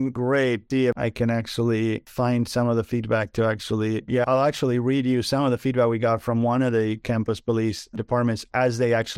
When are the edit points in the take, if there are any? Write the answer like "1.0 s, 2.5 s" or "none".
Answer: 1.0 s, 2.1 s